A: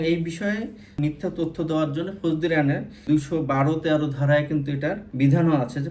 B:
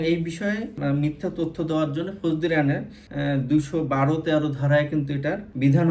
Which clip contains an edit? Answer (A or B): A